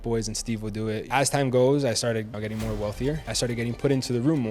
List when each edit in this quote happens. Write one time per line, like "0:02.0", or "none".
0:01.0
0:02.3
0:03.3